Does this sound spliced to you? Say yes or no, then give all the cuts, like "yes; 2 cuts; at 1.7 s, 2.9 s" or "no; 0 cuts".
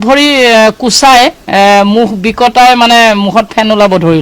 no; 0 cuts